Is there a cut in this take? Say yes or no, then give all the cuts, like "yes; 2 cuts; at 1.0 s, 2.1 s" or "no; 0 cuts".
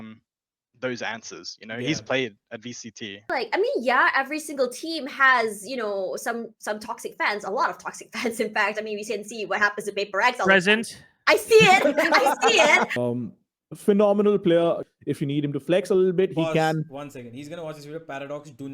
yes; 3 cuts; at 3.3 s, 13.0 s, 14.9 s